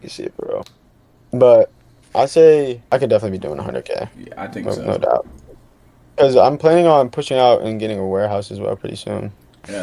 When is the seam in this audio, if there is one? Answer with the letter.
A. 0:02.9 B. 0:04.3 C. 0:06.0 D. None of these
A